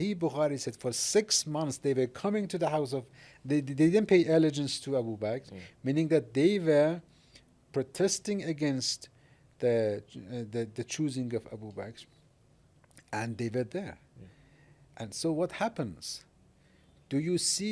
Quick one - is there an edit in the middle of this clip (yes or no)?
no